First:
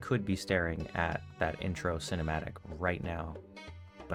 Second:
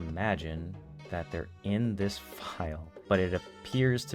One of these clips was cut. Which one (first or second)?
second